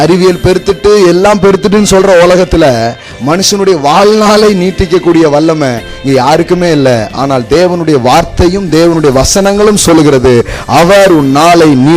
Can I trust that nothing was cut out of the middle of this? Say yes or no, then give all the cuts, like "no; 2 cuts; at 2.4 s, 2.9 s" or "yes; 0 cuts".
yes; 0 cuts